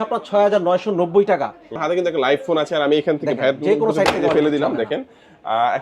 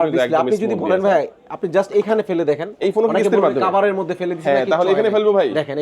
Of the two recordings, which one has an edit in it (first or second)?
first